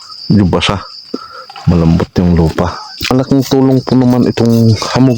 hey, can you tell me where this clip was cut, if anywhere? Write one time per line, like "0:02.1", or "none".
0:03.1

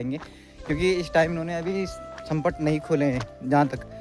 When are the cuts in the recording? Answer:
none

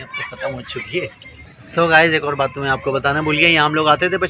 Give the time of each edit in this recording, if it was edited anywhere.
0:01.3

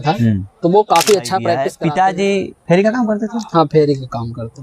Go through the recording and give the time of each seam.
0:01.6

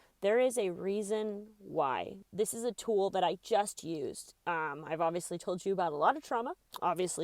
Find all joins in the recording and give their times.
0:02.2

